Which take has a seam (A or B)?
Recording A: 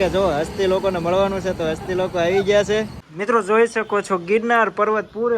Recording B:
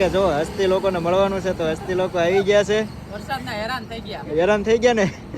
A